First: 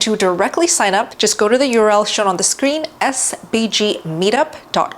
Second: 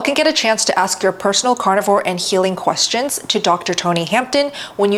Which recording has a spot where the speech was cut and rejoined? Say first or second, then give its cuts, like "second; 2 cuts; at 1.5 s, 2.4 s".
first; 1 cut; at 1.1 s